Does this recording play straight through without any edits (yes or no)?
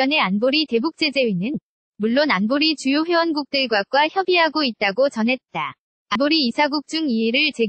no